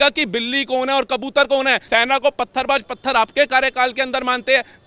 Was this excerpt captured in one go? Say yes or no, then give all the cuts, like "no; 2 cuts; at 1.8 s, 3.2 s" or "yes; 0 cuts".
no; 1 cut; at 1.8 s